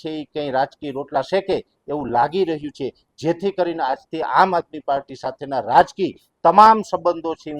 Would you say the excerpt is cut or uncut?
uncut